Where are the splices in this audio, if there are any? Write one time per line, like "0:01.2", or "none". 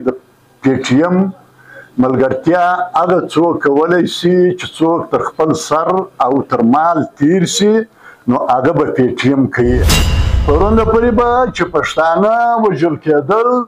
0:10.0